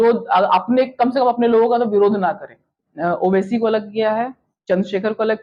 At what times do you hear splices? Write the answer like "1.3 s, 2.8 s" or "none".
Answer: 2.9 s